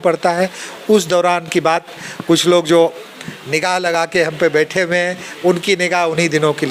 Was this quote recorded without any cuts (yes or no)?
yes